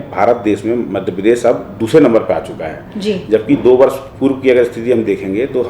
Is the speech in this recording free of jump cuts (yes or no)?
yes